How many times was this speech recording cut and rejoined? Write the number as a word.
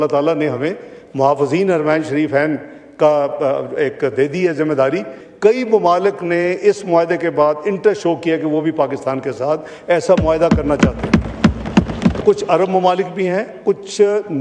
two